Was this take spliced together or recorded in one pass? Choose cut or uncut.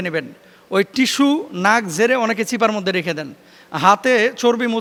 uncut